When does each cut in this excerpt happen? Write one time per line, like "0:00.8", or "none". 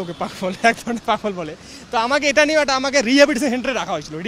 none